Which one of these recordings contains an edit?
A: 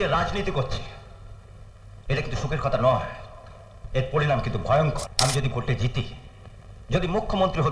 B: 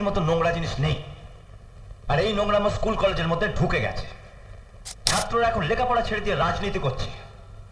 A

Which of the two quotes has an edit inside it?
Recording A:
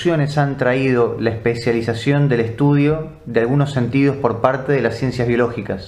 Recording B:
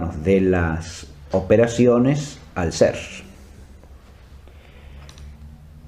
B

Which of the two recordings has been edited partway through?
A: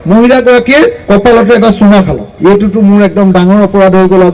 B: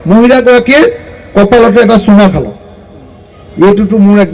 A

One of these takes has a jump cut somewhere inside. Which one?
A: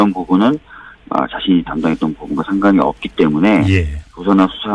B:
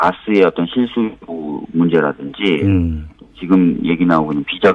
A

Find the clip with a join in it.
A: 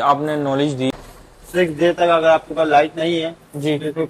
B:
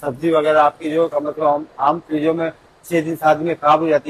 A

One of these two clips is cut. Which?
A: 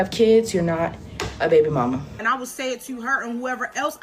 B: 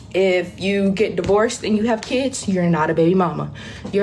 A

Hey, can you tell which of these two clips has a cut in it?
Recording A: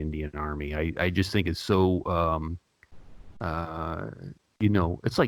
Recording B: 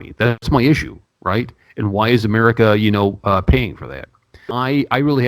B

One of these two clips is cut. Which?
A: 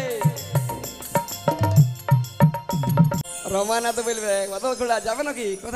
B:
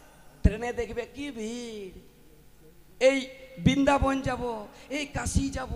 A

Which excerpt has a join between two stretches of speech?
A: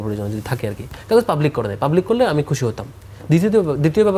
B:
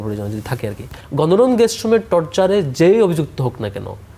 B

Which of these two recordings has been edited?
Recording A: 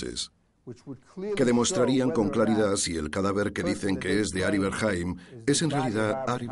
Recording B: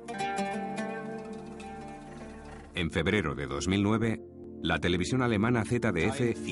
B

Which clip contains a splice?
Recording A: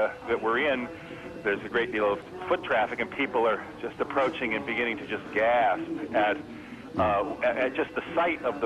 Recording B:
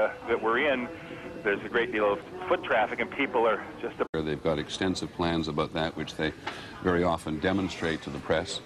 A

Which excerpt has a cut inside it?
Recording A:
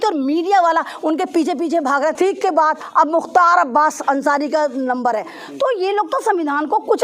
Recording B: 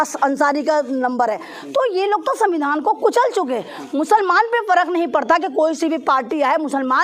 A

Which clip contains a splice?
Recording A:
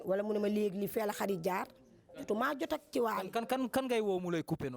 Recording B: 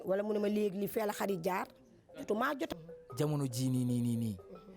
B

